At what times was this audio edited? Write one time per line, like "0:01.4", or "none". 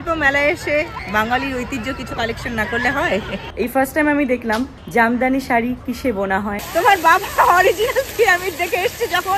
0:01.0
0:03.4
0:04.8
0:06.6